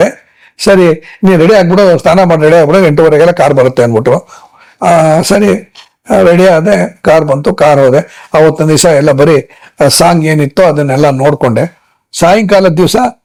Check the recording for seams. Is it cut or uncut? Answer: uncut